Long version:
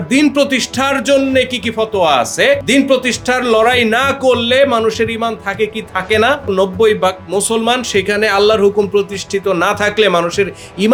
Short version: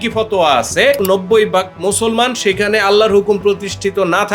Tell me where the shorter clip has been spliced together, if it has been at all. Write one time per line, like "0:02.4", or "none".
0:01.0